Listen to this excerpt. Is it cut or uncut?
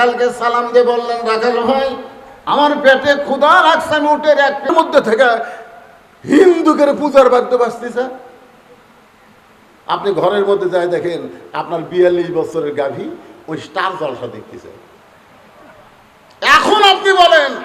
cut